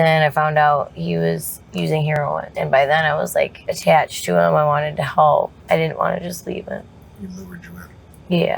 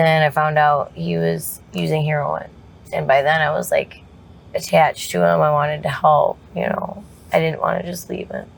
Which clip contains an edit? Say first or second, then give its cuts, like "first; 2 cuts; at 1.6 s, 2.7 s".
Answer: first; 4 cuts; at 2.2 s, 3.7 s, 5.6 s, 7.0 s